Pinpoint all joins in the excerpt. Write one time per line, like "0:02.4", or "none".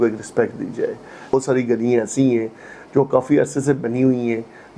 0:01.3